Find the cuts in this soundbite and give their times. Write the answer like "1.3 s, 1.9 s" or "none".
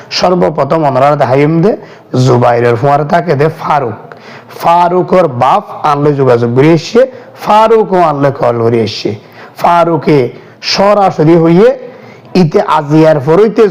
none